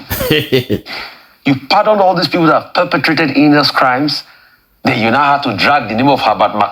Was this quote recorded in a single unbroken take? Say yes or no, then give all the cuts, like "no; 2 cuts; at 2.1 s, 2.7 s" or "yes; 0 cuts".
yes; 0 cuts